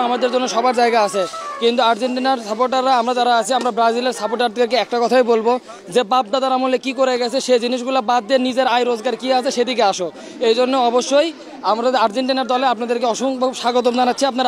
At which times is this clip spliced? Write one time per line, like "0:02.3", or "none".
none